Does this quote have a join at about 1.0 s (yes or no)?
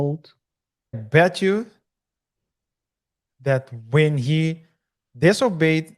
yes